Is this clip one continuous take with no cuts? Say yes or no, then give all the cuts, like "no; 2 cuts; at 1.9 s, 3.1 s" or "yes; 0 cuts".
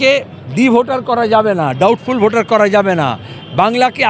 yes; 0 cuts